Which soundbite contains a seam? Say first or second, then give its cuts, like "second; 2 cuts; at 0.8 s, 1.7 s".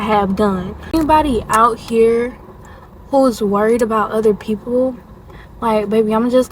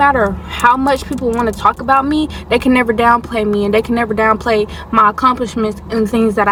first; 1 cut; at 0.9 s